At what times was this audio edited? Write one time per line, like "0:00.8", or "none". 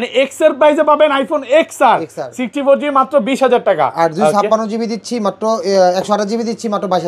none